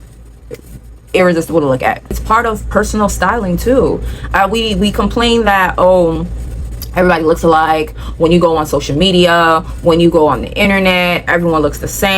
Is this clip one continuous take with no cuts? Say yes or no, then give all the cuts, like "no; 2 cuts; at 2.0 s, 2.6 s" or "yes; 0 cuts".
no; 1 cut; at 2.2 s